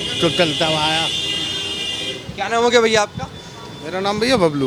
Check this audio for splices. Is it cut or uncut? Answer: uncut